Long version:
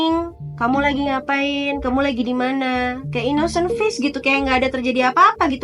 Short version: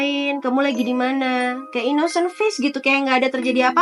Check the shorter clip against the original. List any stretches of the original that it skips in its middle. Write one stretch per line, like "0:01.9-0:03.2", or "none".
none

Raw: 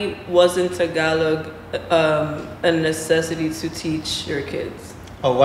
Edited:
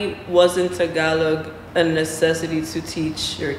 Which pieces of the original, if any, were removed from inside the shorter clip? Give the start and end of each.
0:01.6-0:02.4

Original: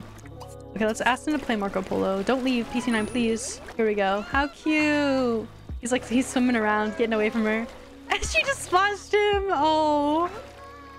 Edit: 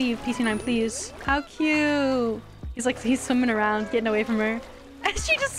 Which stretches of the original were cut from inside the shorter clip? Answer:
0:03.7-0:04.3

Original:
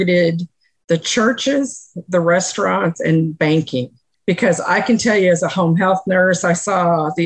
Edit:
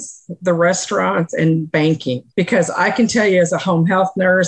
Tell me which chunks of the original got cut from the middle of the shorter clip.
0:03.9-0:04.1

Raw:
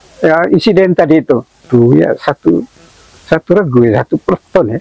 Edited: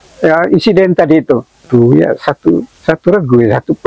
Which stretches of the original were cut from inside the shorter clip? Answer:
0:02.7-0:03.2

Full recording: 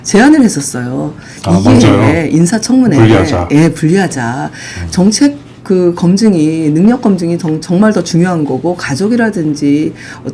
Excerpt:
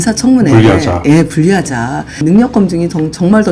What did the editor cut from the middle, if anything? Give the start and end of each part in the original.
0:04.7-0:06.7

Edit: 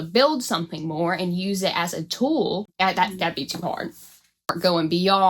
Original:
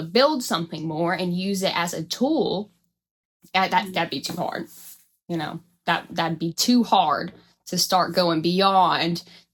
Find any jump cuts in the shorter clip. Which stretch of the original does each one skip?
0:02.7-0:03.4
0:05.3-0:08.1

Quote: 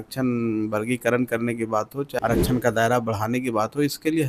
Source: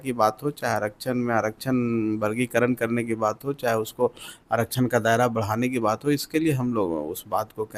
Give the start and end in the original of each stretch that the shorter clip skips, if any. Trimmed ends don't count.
0:03.6-0:04.4

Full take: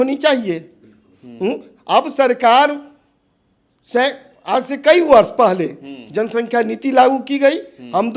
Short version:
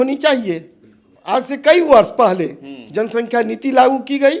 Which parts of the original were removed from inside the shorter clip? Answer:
0:01.1-0:04.3

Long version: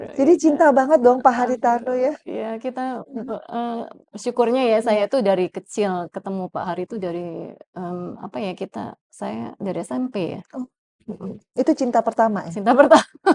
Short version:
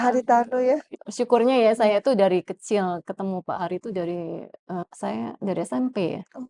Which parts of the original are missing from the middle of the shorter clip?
0:02.3-0:04.0
0:07.9-0:09.0

